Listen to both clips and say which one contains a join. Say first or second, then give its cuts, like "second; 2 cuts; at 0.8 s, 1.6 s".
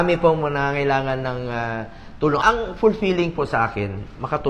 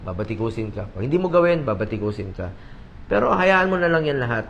first; 1 cut; at 2.4 s